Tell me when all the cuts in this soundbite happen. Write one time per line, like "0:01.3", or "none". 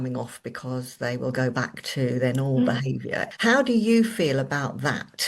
0:03.3